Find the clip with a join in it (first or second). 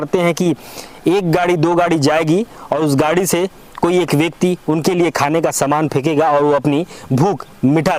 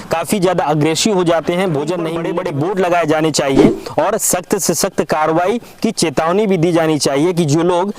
second